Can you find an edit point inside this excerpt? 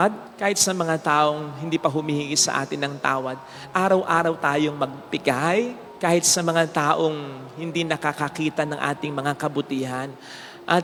no; 0 cuts

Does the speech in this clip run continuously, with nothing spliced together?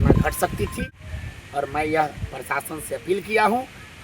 no; 1 cut; at 1.0 s

